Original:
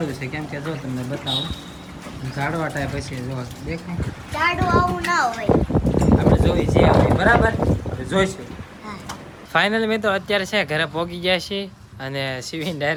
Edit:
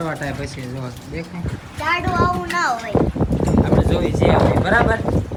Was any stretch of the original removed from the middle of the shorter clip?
no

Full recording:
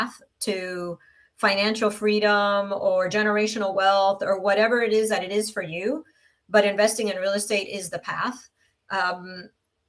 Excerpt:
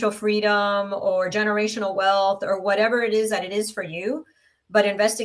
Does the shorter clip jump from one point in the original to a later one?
no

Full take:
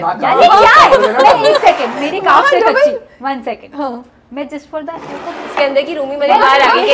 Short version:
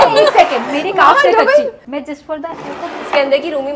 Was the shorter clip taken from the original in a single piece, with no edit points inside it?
no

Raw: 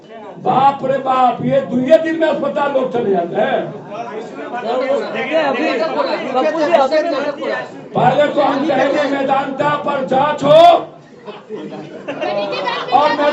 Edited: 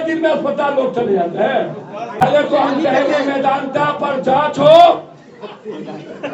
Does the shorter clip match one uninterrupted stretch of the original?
no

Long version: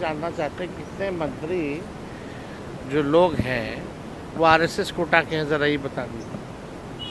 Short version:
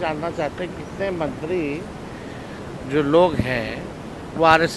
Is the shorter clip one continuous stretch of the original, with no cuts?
yes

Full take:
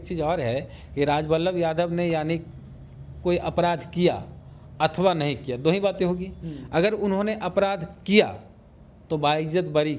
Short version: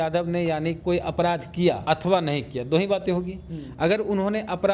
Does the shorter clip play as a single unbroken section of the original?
no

